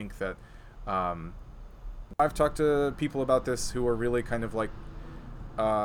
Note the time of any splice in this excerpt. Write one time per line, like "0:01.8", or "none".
0:02.2